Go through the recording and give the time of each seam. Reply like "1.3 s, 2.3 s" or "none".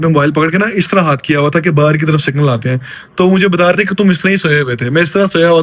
none